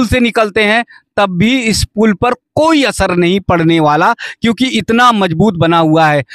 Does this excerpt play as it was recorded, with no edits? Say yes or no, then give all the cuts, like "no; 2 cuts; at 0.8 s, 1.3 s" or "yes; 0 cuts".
yes; 0 cuts